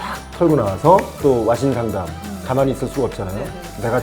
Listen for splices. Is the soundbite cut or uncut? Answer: cut